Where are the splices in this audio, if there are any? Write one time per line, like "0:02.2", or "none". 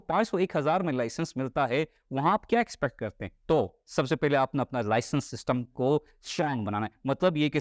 none